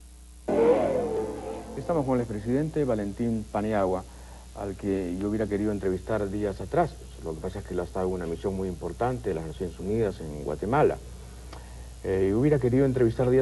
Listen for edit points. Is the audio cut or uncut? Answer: cut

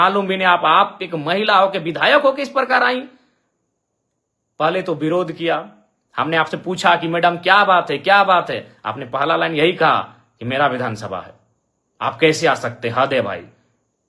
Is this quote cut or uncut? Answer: uncut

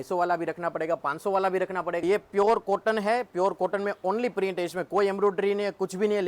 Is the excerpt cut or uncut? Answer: cut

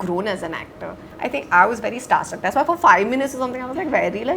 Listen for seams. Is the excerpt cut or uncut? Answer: cut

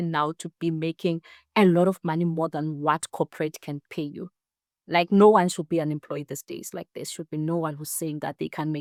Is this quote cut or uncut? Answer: uncut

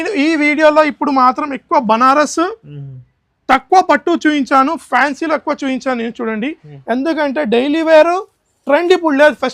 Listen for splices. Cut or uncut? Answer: uncut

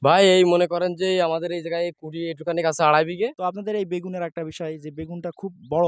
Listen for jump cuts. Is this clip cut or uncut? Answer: cut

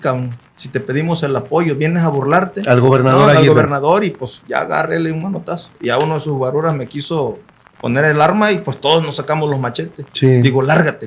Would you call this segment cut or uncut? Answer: uncut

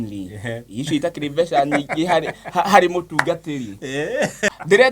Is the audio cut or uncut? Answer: cut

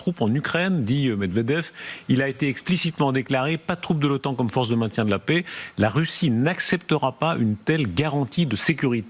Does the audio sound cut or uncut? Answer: uncut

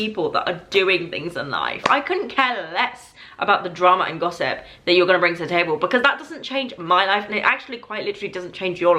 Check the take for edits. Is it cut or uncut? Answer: uncut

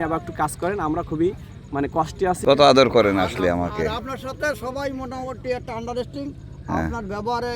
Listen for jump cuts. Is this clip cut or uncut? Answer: cut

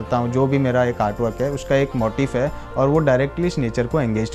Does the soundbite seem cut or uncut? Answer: uncut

